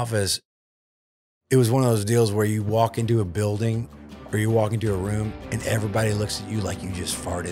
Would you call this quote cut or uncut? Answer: uncut